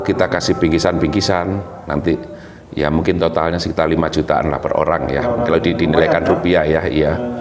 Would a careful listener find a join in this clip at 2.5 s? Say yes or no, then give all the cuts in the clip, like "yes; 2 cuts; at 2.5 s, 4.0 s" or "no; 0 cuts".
no; 0 cuts